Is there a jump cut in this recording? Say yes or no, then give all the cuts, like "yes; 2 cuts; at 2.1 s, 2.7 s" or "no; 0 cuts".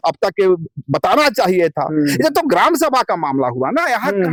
no; 0 cuts